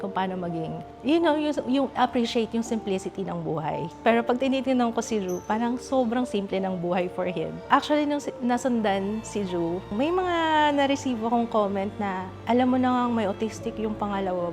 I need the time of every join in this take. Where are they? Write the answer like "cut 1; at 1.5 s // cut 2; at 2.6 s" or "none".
cut 1; at 3.9 s // cut 2; at 7.7 s // cut 3; at 9.9 s